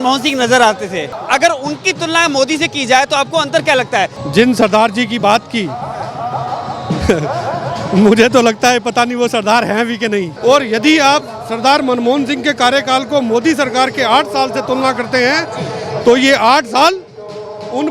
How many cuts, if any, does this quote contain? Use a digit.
3